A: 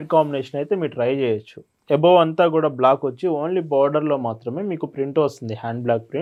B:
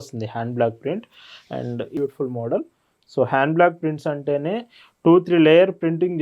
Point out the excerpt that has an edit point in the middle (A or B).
B